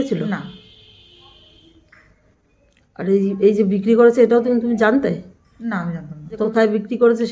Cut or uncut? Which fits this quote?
cut